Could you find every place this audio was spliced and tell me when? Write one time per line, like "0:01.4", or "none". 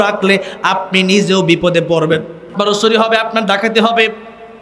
0:02.5